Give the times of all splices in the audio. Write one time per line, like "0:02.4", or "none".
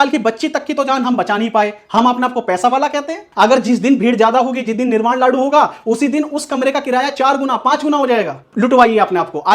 0:03.2
0:08.4